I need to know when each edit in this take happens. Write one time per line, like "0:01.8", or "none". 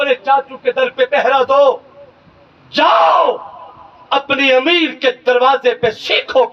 none